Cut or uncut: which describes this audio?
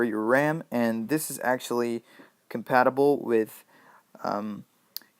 cut